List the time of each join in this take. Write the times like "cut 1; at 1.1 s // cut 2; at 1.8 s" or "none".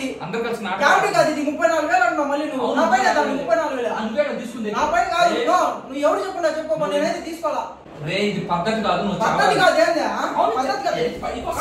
cut 1; at 7.8 s